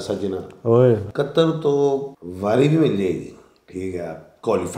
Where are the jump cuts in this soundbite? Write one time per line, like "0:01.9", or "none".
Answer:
0:01.1
0:02.2